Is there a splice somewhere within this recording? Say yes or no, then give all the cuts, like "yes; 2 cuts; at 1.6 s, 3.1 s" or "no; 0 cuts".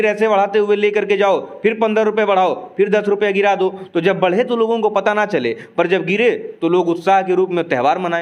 no; 0 cuts